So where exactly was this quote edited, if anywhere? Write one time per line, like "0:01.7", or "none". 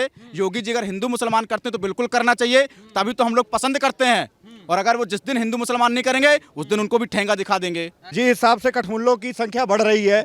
0:08.1